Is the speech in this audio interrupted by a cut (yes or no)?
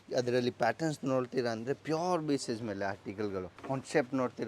yes